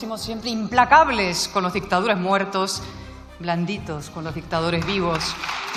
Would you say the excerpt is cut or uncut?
uncut